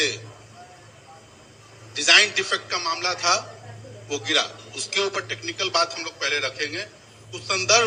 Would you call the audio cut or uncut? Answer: uncut